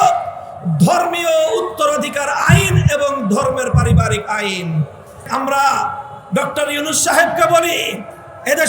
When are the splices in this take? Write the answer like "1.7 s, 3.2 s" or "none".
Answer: 5.3 s